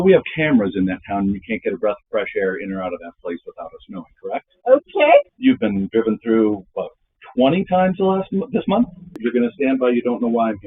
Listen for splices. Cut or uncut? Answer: cut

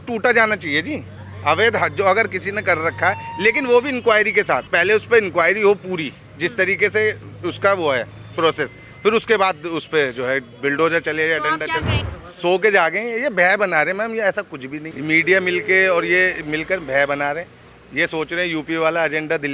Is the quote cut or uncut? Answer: cut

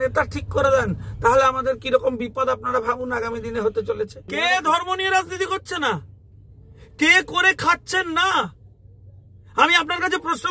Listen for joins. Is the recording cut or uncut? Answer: cut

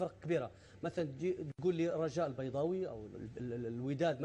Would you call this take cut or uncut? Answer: cut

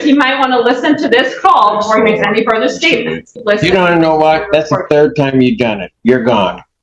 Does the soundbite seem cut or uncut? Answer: cut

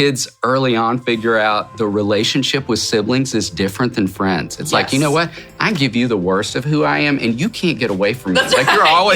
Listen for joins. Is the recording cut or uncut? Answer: uncut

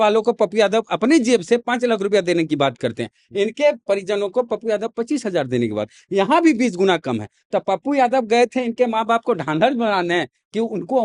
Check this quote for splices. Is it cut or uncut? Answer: uncut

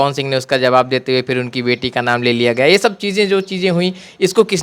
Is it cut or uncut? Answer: uncut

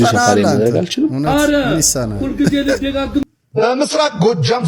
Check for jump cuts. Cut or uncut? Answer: cut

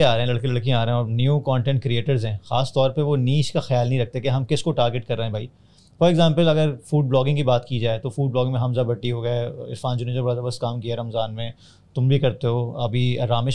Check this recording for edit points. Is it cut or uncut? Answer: uncut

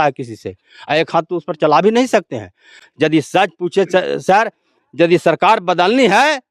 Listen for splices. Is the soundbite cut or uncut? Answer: uncut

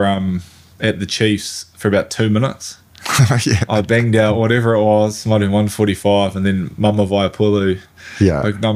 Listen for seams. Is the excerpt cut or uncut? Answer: uncut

